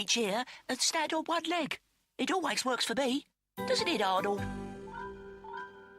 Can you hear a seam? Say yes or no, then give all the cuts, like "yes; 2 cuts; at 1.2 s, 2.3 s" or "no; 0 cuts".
yes; 1 cut; at 3.1 s